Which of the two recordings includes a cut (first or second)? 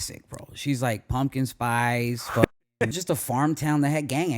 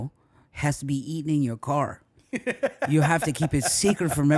first